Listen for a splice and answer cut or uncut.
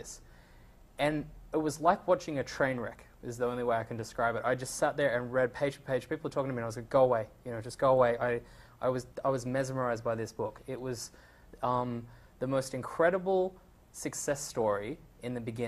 cut